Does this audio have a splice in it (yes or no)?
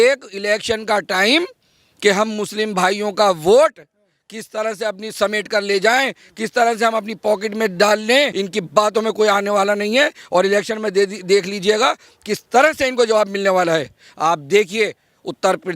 yes